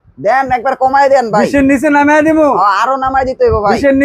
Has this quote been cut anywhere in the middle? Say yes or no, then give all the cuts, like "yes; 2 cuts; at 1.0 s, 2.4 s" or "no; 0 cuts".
no; 0 cuts